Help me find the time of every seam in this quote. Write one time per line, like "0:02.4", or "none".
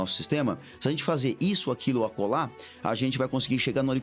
none